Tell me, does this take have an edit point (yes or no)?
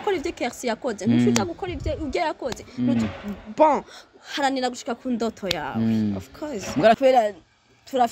yes